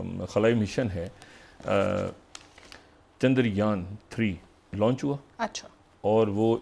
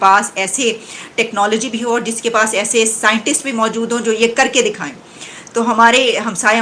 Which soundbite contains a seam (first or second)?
first